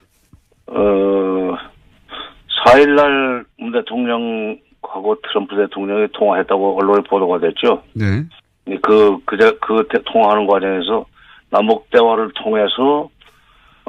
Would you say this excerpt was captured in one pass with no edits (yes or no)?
yes